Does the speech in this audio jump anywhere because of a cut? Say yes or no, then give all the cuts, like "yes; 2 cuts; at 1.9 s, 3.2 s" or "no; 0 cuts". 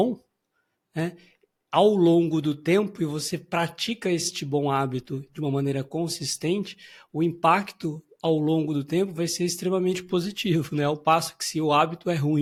no; 0 cuts